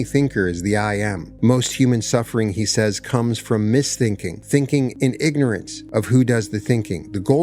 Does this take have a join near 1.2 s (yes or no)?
yes